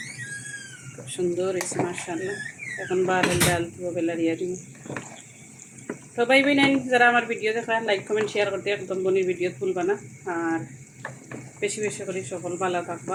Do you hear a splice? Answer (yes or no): no